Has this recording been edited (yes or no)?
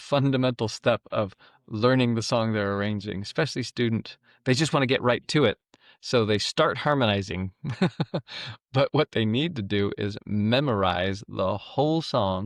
no